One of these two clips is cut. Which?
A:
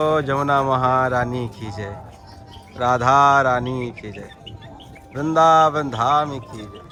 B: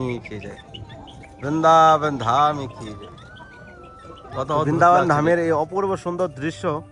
B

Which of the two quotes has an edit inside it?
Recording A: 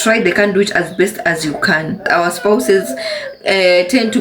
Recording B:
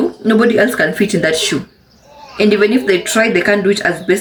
A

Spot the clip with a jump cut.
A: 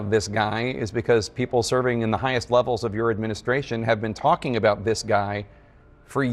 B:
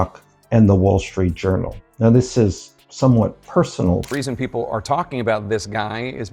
B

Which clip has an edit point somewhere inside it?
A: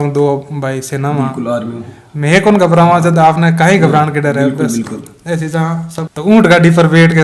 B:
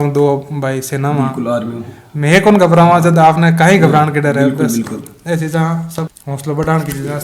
A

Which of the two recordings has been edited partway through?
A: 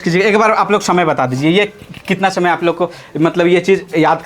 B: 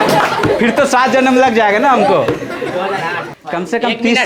B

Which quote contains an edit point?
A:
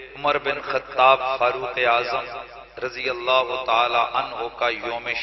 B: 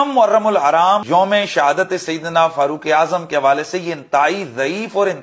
B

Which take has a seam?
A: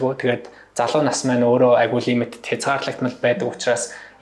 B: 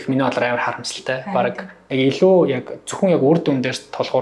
B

